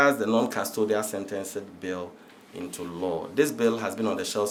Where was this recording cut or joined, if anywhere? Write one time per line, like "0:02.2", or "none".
none

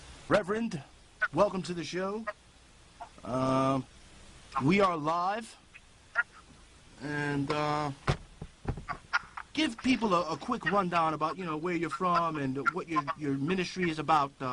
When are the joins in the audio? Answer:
0:04.1

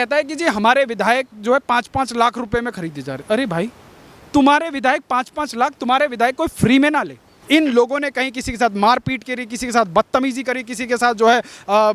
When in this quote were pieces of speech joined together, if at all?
0:07.3

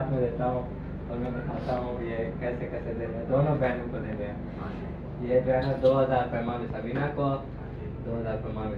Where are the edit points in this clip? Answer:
none

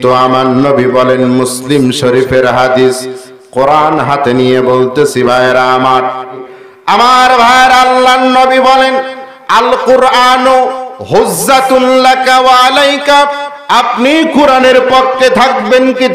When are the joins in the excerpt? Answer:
0:06.5

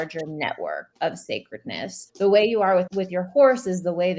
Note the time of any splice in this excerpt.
0:00.9
0:02.0
0:03.0

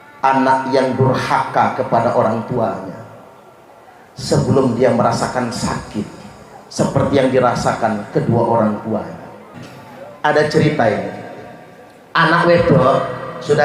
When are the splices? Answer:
0:09.5

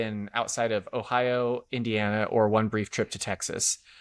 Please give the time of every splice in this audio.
none

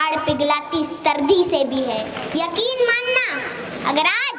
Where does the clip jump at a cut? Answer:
0:02.2

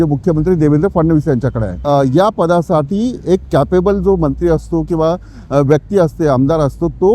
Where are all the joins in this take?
0:01.7

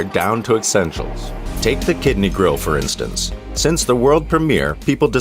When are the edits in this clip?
none

